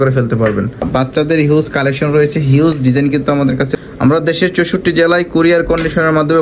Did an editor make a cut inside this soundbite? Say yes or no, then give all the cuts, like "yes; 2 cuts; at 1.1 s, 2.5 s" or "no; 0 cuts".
yes; 2 cuts; at 0.8 s, 3.7 s